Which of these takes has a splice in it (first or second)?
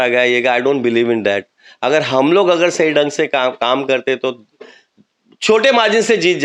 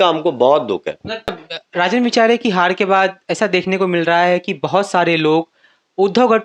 second